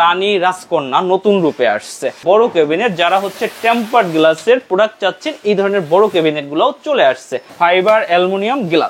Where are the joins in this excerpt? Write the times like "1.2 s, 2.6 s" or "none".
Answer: 2.2 s, 7.4 s